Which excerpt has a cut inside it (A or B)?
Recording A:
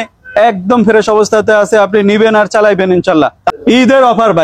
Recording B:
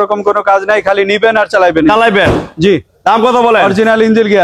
A